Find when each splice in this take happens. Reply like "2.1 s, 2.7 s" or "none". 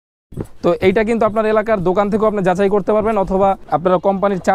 3.6 s